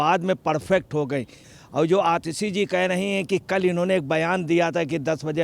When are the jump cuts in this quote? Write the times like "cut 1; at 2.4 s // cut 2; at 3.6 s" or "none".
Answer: cut 1; at 1.4 s